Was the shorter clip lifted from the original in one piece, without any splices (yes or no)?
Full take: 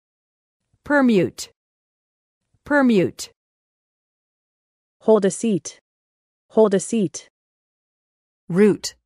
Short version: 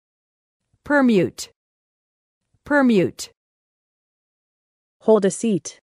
yes